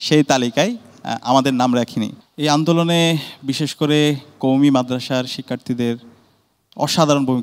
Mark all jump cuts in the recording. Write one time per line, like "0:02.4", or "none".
0:02.2

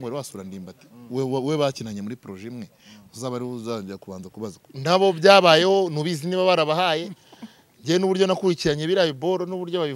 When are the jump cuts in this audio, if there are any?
0:04.7

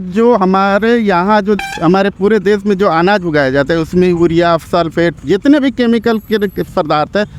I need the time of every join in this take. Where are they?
none

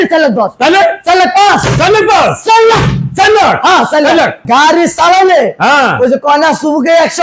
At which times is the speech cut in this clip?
0:04.4

